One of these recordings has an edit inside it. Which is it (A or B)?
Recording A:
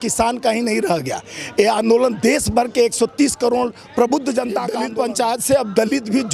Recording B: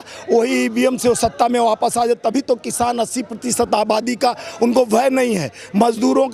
A